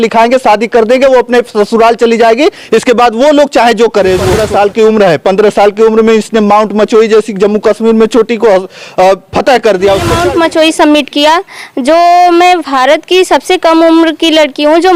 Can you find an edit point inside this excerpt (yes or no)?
yes